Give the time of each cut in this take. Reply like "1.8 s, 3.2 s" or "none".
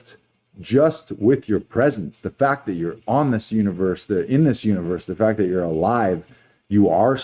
none